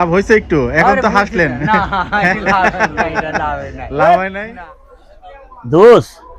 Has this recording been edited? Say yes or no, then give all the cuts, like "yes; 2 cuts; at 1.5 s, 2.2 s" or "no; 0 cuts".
yes; 1 cut; at 4.5 s